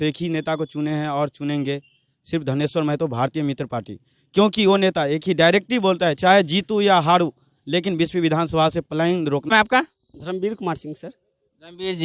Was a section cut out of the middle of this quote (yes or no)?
no